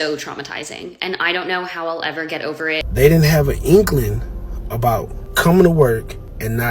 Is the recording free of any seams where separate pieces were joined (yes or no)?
no